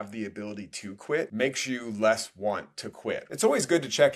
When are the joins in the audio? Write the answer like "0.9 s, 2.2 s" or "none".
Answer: 1.3 s, 3.2 s